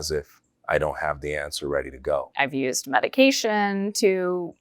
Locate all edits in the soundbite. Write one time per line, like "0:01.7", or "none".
0:02.3